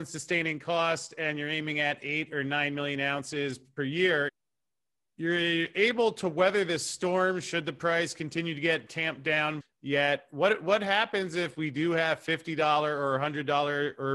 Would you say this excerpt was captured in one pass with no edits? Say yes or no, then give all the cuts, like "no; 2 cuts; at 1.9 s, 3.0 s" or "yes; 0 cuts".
no; 3 cuts; at 3.6 s, 4.3 s, 9.6 s